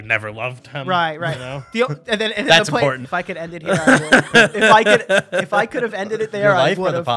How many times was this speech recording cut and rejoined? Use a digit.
1